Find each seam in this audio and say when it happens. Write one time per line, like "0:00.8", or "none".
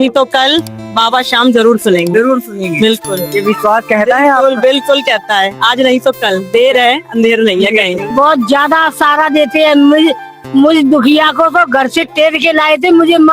0:08.1

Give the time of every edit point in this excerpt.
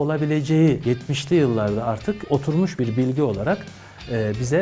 0:00.8
0:02.2

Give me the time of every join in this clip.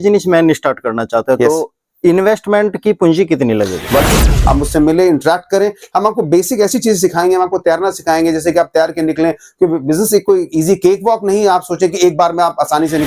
0:04.2

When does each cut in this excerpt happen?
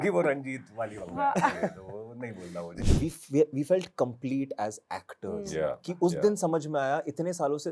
0:02.8

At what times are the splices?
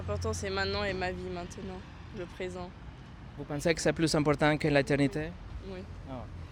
none

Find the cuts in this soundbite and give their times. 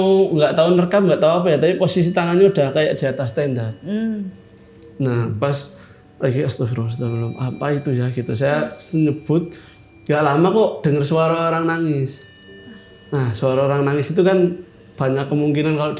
none

